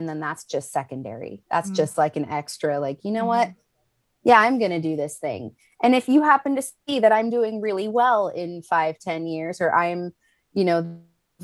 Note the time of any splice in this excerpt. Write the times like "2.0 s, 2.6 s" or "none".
none